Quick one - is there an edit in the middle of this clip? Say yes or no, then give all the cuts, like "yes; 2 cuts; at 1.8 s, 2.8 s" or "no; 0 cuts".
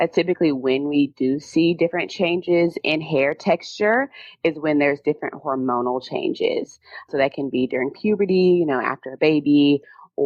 no; 0 cuts